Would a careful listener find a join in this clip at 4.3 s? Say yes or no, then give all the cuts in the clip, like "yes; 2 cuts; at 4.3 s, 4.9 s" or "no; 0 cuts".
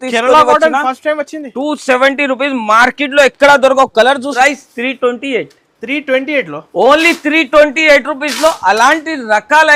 yes; 1 cut; at 4.3 s